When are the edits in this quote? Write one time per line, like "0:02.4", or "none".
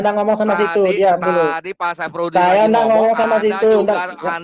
none

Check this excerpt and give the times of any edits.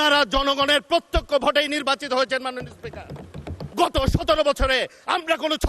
0:03.6

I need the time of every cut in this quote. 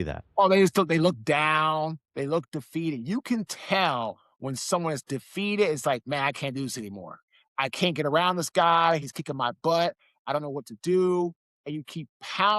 none

